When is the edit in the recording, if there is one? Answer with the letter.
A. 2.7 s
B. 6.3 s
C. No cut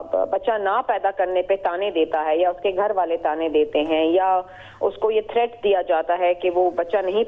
C